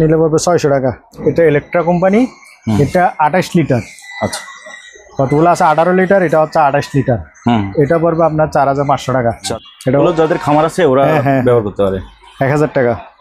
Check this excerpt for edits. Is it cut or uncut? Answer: cut